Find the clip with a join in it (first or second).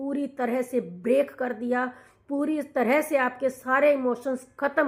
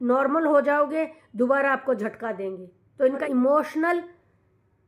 second